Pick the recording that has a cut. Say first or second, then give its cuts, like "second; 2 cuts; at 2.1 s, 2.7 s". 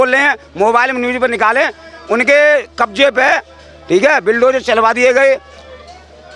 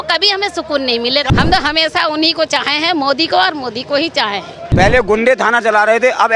second; 2 cuts; at 1.3 s, 4.7 s